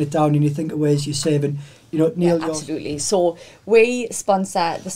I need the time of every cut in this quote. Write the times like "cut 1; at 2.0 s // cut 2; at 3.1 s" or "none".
cut 1; at 2.6 s